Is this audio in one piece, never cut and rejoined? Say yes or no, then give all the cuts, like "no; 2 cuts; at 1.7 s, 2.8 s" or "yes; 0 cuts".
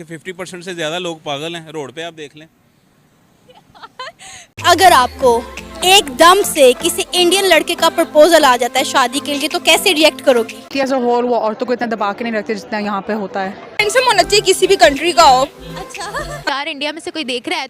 no; 4 cuts; at 4.6 s, 10.7 s, 13.6 s, 16.5 s